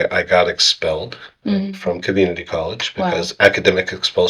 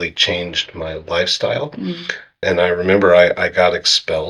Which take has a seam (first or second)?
second